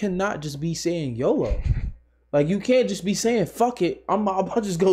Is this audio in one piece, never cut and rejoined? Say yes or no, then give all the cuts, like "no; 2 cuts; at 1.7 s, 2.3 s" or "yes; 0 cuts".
yes; 0 cuts